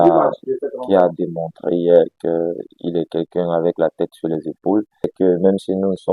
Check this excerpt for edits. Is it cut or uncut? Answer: cut